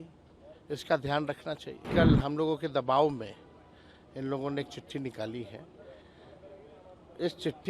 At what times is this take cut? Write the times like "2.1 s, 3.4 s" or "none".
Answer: 1.9 s